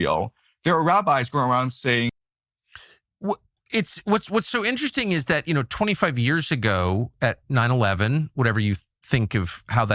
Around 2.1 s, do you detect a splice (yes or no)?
yes